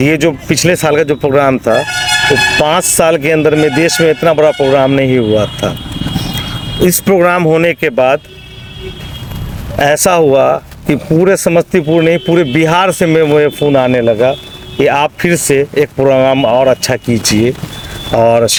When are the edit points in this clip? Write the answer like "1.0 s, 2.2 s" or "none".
none